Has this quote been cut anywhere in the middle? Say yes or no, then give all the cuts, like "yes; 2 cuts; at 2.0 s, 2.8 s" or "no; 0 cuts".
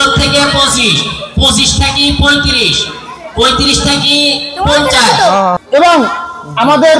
yes; 1 cut; at 5.6 s